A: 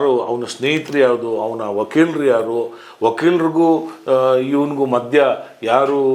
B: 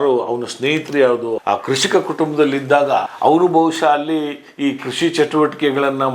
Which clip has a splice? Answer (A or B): B